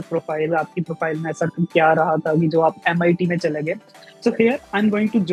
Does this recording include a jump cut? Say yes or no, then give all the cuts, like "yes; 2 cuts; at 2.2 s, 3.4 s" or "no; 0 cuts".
no; 0 cuts